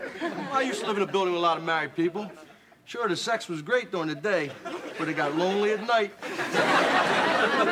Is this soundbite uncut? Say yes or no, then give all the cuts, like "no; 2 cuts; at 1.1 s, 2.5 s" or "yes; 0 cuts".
yes; 0 cuts